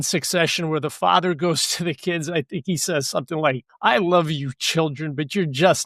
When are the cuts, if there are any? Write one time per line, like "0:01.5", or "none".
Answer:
0:03.7